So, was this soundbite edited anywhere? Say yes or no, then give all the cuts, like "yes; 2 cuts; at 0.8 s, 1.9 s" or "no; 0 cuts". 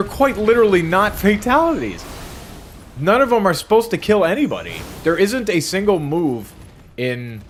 no; 0 cuts